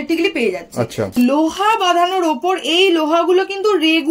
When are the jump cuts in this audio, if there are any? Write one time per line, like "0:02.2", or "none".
0:01.1